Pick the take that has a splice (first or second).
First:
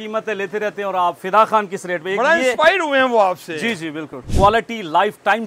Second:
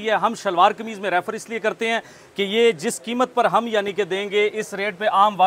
first